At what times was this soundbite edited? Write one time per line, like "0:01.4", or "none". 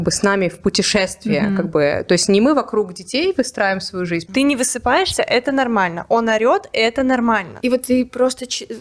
0:04.2
0:07.5